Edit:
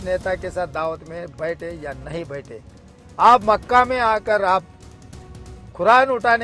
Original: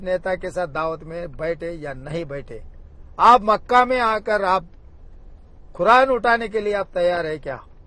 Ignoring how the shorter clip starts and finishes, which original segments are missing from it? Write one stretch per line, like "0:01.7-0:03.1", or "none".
none